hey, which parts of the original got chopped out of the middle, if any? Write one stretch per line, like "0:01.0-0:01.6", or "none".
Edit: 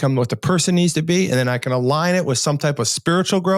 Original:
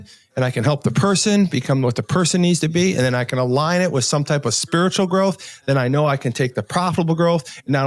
none